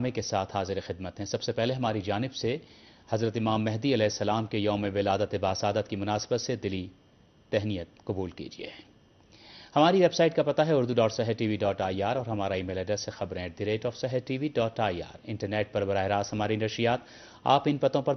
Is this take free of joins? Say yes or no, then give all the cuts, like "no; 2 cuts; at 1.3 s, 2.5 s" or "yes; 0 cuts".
yes; 0 cuts